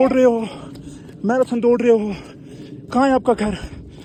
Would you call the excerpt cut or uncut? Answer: uncut